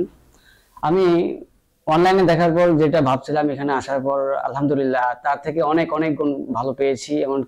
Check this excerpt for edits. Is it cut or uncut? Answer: uncut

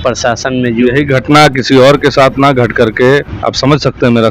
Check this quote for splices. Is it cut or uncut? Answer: cut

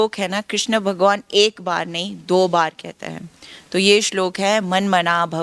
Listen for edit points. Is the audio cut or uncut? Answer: uncut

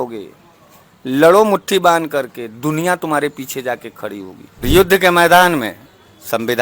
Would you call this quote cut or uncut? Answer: cut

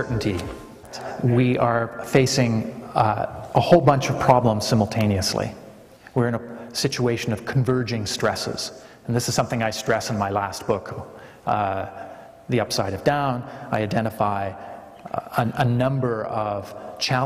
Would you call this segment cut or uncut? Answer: uncut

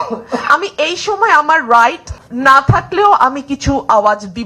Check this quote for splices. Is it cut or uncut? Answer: uncut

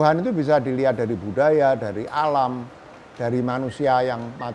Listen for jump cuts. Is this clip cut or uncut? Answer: uncut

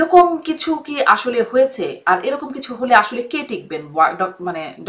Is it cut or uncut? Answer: uncut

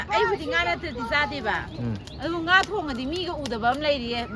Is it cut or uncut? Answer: uncut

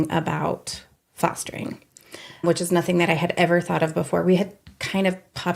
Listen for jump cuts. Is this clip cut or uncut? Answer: cut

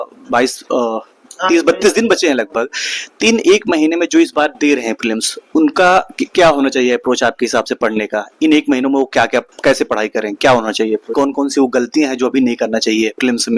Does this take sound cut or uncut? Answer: cut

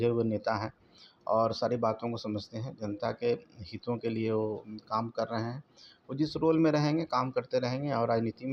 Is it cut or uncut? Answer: uncut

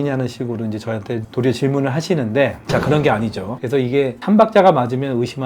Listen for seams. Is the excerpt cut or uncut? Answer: cut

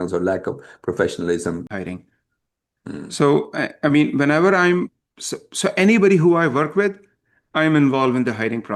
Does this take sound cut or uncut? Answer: cut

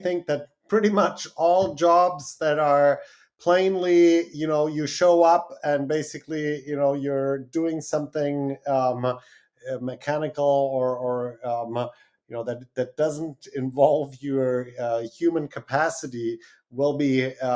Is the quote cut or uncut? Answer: uncut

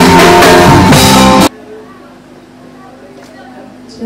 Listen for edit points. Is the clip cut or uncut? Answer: cut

